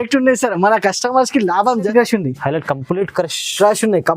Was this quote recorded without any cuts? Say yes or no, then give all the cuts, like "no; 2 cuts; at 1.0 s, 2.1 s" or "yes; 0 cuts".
no; 1 cut; at 1.9 s